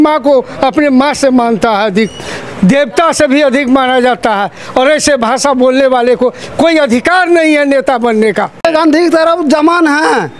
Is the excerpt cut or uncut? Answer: cut